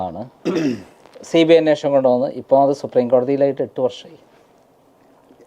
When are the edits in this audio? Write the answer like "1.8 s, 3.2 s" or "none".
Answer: none